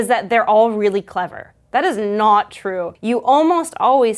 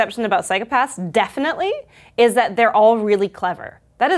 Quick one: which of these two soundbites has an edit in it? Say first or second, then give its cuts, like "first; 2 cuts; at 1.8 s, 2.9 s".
first; 1 cut; at 2.9 s